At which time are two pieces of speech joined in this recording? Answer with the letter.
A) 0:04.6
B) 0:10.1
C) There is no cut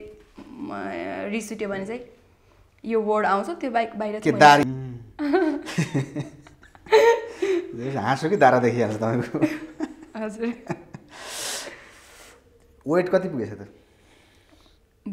A